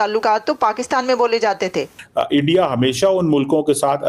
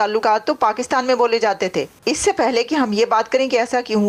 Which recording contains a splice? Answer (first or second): first